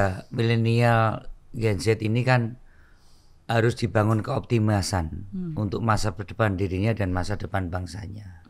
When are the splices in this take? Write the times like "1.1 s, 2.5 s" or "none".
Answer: none